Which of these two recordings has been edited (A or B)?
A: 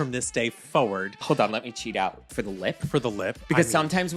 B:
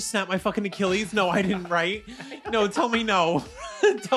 A